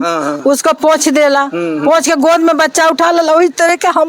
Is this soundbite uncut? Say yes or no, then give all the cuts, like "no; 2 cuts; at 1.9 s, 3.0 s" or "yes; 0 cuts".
yes; 0 cuts